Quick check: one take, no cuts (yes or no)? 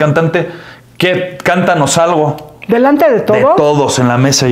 yes